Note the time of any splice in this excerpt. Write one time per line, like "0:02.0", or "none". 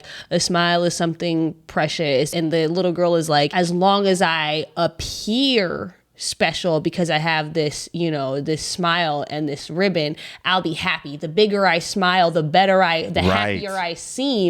0:02.3
0:03.5

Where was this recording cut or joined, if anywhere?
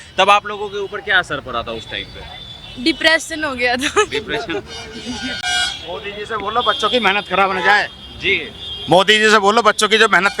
0:05.4

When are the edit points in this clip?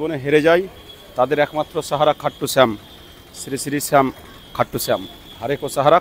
none

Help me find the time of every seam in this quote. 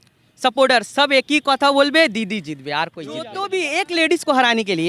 0:03.4

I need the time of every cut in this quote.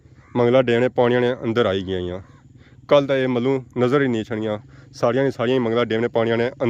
none

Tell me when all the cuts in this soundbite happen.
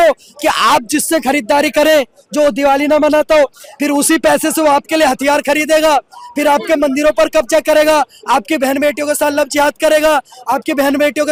none

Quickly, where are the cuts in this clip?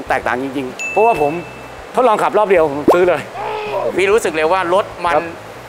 none

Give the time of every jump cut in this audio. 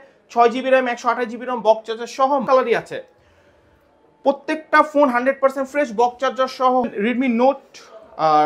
0:02.4
0:06.9

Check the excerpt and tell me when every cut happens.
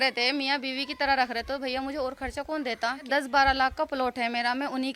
0:03.1

